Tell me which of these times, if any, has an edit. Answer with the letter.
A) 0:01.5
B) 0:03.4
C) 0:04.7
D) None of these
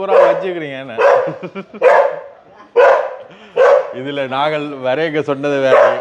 D